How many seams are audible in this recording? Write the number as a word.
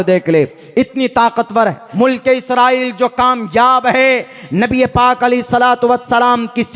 one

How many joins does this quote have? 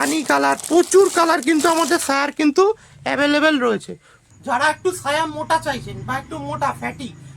one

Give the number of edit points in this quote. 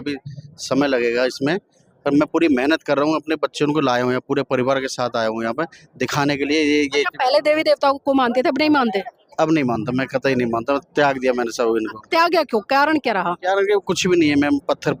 zero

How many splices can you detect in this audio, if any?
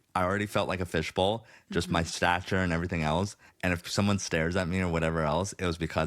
one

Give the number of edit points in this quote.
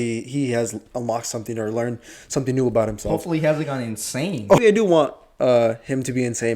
one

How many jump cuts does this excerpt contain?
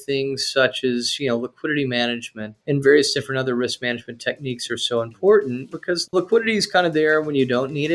one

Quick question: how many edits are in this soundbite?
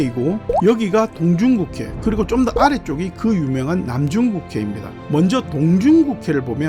one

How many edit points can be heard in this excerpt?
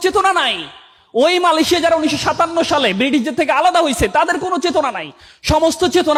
zero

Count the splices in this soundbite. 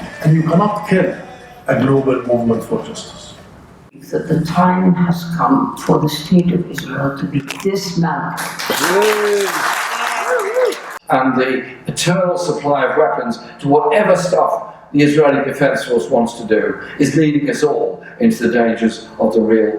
two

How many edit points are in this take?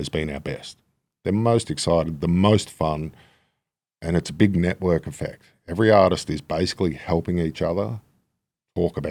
zero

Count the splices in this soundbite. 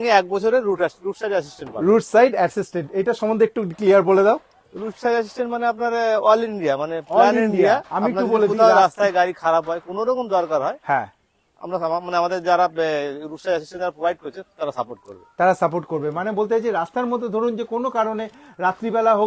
zero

